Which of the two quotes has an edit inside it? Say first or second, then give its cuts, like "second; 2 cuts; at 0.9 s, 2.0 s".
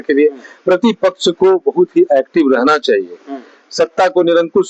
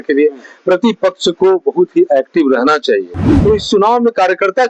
second; 1 cut; at 3.2 s